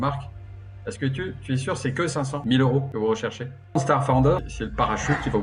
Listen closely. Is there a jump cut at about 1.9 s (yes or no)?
no